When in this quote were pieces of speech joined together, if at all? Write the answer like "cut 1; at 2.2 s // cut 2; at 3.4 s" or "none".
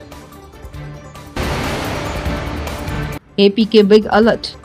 none